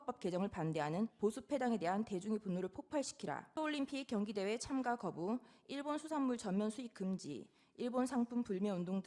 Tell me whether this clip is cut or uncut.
cut